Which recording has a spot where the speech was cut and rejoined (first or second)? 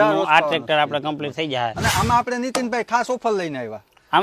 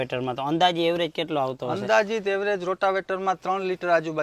first